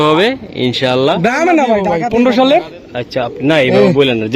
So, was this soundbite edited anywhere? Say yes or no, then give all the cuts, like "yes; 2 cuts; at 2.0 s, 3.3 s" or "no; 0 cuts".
yes; 1 cut; at 1.6 s